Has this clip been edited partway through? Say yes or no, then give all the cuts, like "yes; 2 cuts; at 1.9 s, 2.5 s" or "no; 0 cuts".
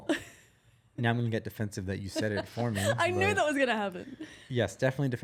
no; 0 cuts